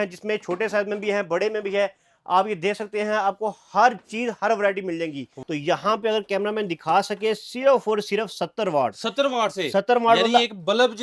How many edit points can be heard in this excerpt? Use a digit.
1